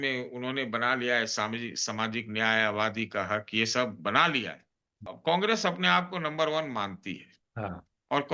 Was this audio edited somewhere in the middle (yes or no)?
yes